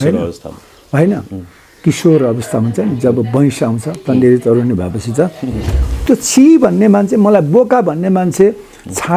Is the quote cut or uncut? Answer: cut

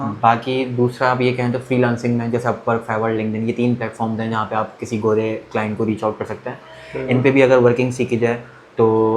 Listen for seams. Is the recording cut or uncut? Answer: uncut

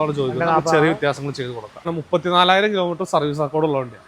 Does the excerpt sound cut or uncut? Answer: cut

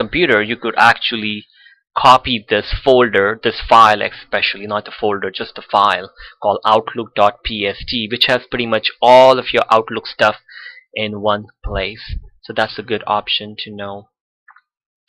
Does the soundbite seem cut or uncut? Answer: cut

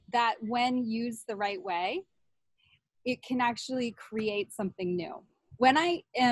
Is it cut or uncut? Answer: cut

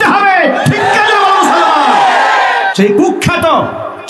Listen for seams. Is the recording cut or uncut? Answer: cut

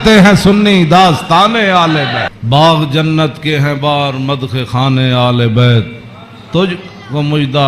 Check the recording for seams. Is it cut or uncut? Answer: cut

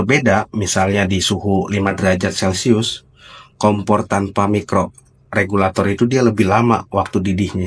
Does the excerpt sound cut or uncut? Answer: uncut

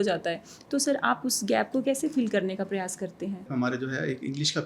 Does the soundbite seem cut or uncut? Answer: cut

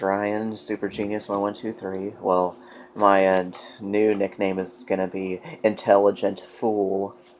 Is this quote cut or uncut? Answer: uncut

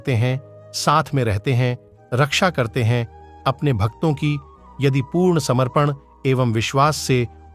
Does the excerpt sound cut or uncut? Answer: uncut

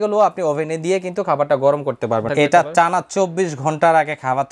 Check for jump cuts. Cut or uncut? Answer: cut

